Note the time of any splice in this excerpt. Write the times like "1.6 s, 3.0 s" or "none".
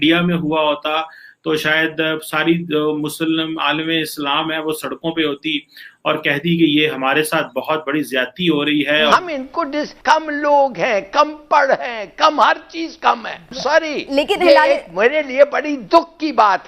9.1 s, 13.5 s